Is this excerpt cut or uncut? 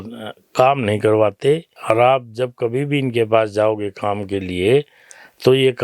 cut